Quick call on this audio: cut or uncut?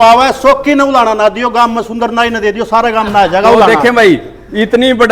uncut